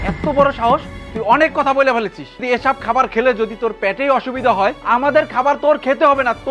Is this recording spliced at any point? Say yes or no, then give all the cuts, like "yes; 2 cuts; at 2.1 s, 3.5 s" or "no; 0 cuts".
no; 0 cuts